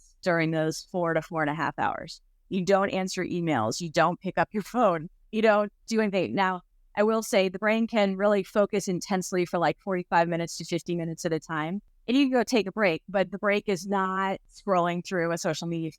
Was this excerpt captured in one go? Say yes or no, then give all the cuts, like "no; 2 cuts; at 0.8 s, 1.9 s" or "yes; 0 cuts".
no; 2 cuts; at 11.8 s, 14.5 s